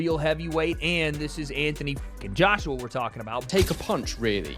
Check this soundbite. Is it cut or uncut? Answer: cut